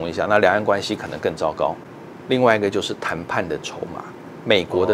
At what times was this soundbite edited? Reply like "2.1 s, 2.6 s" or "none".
1.8 s